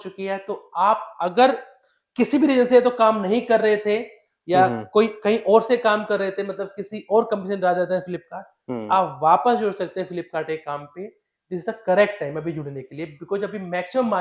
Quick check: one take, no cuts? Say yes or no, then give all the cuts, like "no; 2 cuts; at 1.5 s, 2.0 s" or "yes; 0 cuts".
yes; 0 cuts